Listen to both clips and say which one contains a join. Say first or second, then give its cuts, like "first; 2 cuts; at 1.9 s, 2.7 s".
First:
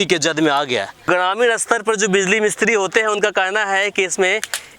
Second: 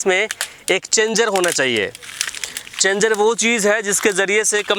first; 1 cut; at 1.0 s